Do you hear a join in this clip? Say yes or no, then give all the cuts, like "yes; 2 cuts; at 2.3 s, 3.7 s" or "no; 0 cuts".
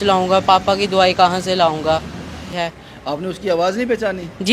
yes; 1 cut; at 2.5 s